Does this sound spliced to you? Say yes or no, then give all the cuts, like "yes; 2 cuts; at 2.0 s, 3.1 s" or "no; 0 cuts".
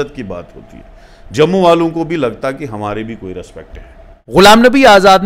yes; 1 cut; at 4.1 s